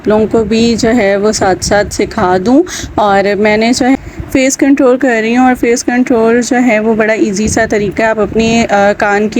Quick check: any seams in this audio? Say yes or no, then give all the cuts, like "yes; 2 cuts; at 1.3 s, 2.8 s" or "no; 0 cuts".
yes; 1 cut; at 4.0 s